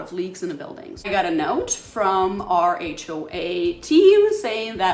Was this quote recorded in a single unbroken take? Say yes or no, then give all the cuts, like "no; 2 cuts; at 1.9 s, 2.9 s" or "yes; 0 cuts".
no; 1 cut; at 1.1 s